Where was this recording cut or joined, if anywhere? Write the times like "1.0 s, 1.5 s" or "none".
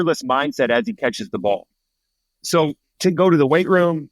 2.9 s